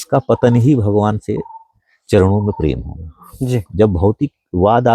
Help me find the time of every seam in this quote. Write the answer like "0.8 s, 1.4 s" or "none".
none